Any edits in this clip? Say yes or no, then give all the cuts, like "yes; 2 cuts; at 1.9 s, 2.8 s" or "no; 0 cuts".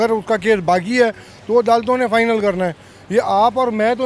no; 0 cuts